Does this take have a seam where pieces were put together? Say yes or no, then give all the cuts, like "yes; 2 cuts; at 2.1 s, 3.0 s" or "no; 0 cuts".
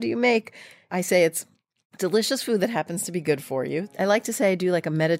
yes; 1 cut; at 3.9 s